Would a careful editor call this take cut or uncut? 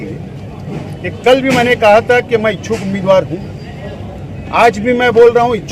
uncut